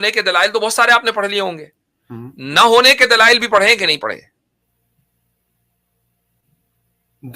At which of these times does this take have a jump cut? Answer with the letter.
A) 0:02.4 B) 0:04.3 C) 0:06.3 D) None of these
D